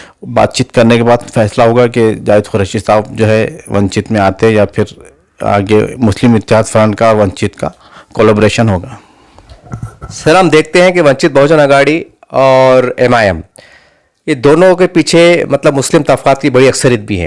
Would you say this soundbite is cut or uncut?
uncut